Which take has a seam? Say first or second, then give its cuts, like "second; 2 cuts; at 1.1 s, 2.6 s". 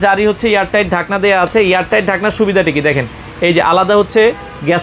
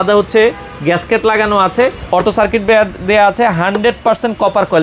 second; 1 cut; at 2.0 s